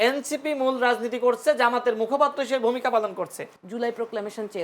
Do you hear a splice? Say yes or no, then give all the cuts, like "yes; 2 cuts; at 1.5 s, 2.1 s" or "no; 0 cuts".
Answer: yes; 1 cut; at 3.6 s